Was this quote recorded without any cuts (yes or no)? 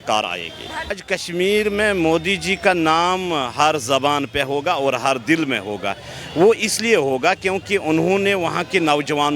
no